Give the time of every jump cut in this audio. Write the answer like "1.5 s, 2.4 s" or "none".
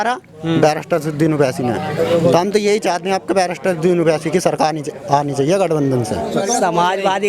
6.3 s